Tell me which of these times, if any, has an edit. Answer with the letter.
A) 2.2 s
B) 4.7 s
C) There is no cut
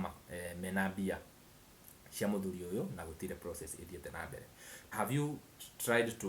B